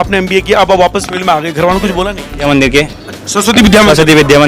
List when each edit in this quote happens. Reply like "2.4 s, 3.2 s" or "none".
2.4 s